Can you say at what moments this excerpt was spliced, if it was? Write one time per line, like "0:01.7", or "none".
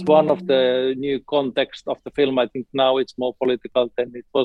none

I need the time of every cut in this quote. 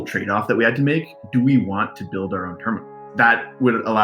0:01.2
0:03.0

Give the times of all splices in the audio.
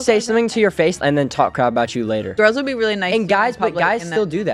none

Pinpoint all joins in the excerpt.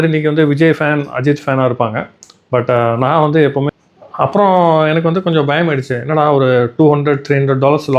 0:03.7

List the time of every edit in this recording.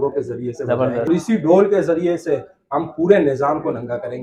0:01.1

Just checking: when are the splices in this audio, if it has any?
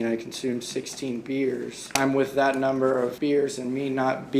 0:01.9
0:03.2

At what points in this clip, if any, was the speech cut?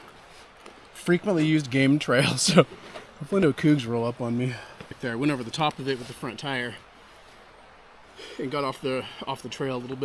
none

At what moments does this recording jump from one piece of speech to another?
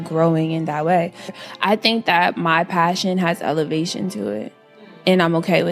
0:01.3

